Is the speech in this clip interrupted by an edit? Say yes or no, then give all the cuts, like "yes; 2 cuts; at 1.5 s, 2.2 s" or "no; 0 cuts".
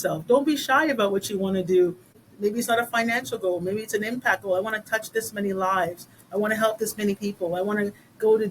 yes; 1 cut; at 2.2 s